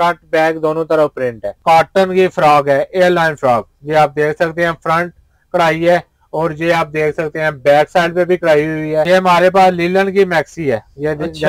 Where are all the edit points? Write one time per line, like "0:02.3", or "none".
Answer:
0:01.5
0:09.1